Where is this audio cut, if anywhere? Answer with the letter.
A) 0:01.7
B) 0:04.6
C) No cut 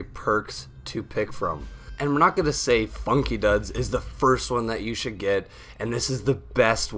C